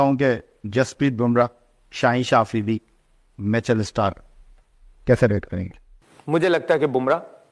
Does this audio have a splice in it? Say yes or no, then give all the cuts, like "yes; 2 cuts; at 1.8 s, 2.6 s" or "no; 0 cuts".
no; 0 cuts